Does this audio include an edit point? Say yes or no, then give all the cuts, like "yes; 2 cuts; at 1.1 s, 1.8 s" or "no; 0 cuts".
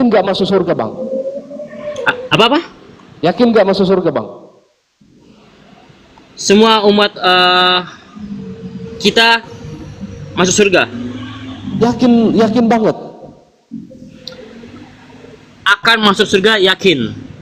no; 0 cuts